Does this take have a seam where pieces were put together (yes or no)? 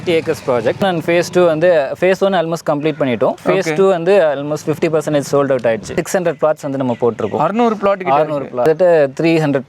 yes